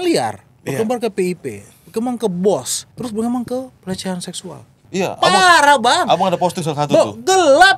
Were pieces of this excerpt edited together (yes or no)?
yes